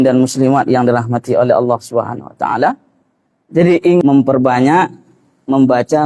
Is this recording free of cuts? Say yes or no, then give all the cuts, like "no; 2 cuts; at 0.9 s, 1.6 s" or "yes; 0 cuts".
no; 1 cut; at 4.0 s